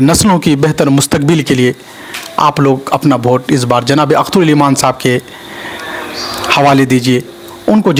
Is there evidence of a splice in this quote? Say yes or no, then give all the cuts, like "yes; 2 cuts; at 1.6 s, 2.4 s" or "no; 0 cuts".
no; 0 cuts